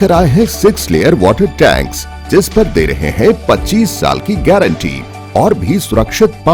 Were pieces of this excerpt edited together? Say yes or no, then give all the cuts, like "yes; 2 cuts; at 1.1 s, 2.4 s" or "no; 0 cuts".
no; 0 cuts